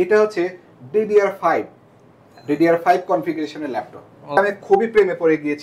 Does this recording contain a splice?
yes; 1 cut; at 4.4 s

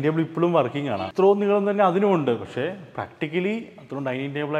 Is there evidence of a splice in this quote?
yes; 1 cut; at 1.1 s

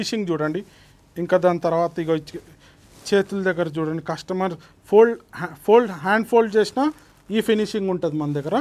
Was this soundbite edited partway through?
no; 0 cuts

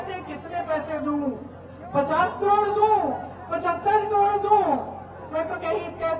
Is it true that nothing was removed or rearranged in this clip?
yes; 0 cuts

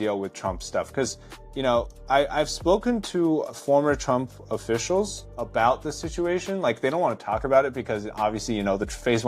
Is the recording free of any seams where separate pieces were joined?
no; 3 cuts; at 2.0 s, 3.5 s, 5.2 s

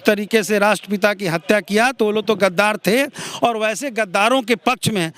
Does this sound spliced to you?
no; 0 cuts

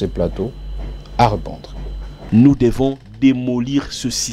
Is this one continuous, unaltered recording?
no; 1 cut; at 2.1 s

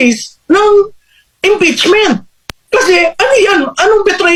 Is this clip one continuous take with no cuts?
yes; 0 cuts

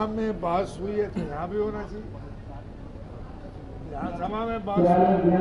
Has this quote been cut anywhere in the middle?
no; 0 cuts

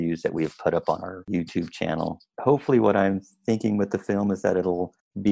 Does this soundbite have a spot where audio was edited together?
yes; 2 cuts; at 1.2 s, 2.3 s

